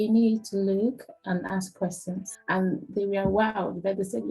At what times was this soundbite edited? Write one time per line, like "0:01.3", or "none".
0:02.3